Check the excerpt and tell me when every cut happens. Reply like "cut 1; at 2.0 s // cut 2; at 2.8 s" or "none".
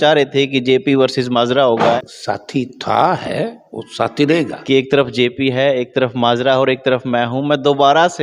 cut 1; at 2.0 s // cut 2; at 4.6 s